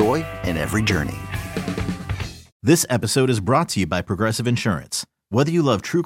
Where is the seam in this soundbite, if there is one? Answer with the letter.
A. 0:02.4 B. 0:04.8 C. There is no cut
A